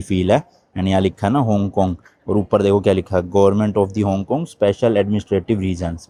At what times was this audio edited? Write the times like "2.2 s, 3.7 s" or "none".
none